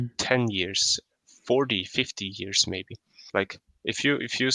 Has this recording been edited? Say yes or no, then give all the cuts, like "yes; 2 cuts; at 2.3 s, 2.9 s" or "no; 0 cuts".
yes; 1 cut; at 3.2 s